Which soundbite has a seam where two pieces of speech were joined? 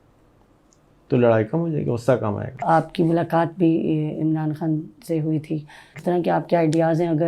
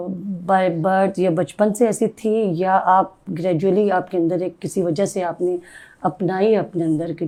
first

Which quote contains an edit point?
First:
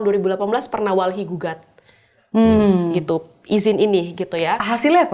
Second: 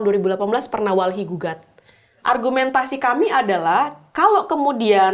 second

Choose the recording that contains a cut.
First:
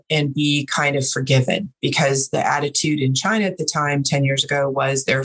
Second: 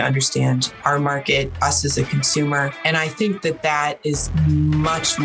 second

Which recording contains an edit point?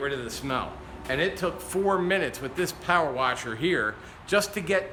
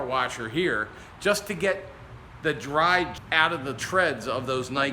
second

